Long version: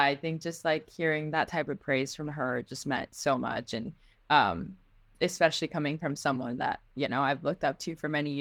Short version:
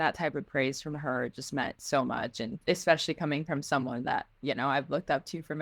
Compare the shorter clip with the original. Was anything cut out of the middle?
yes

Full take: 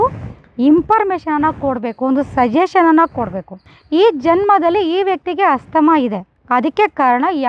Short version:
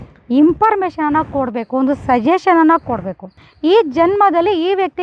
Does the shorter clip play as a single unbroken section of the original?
yes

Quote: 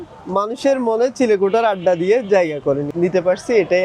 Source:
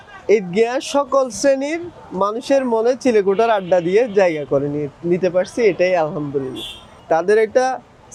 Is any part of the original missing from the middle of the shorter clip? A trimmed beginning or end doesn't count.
yes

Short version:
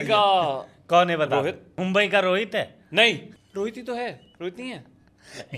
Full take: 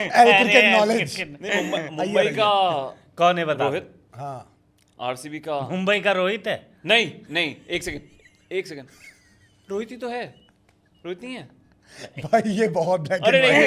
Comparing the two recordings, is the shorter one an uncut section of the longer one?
no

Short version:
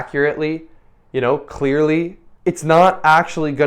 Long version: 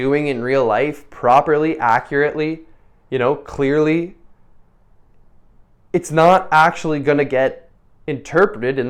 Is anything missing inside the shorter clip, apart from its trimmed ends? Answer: yes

